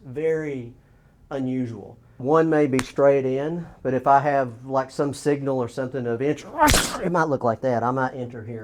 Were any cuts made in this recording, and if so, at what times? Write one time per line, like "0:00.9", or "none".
0:02.2